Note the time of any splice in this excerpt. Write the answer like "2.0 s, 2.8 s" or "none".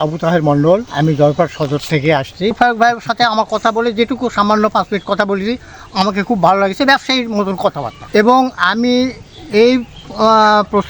0.9 s, 2.5 s, 7.9 s